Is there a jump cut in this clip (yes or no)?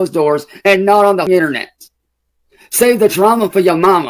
yes